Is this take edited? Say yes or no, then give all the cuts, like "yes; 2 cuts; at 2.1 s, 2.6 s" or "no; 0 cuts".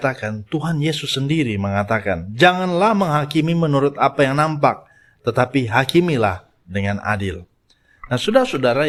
no; 0 cuts